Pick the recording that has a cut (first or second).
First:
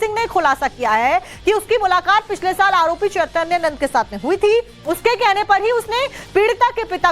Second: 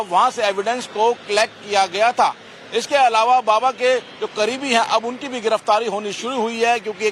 first